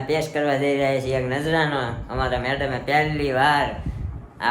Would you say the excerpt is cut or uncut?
uncut